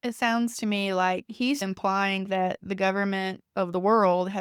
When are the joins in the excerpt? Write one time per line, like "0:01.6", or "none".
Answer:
0:03.4